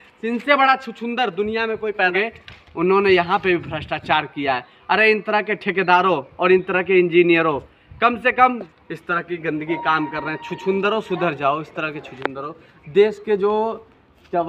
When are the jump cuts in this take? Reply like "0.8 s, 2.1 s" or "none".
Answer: 2.1 s, 8.6 s